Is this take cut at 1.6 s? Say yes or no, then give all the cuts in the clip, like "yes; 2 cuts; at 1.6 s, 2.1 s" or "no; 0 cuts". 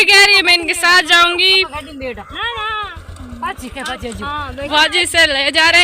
no; 1 cut; at 4.7 s